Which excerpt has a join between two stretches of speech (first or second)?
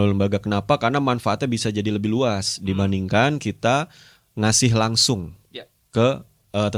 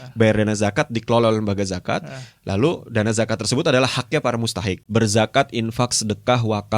second